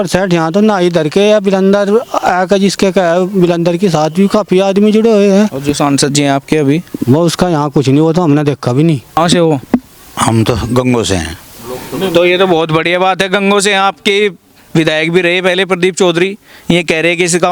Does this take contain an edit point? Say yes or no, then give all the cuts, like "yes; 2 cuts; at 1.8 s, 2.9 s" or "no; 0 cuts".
yes; 1 cut; at 9.0 s